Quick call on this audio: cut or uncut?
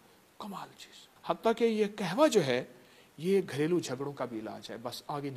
cut